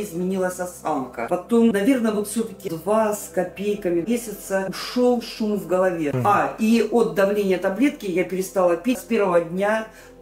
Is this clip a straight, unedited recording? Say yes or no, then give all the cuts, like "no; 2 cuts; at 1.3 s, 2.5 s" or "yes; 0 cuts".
no; 3 cuts; at 1.3 s, 6.1 s, 9.0 s